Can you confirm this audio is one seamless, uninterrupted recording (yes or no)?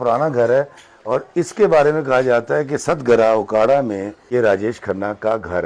no